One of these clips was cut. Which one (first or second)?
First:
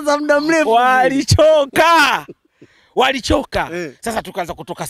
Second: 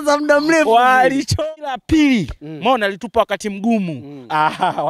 second